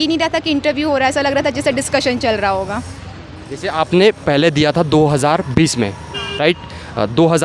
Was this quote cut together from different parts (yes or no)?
no